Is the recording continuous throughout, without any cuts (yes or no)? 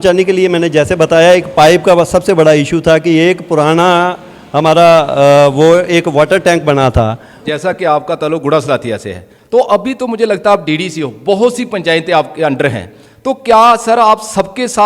no